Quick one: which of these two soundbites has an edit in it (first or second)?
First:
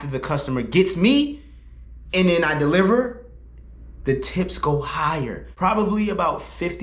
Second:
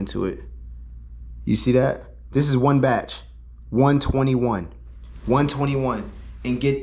first